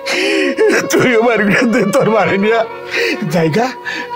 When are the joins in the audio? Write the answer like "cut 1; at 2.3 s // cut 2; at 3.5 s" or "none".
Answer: none